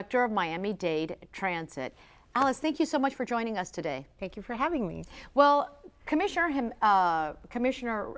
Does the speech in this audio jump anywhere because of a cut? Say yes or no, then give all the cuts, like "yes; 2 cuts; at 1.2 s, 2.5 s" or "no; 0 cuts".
yes; 1 cut; at 1.0 s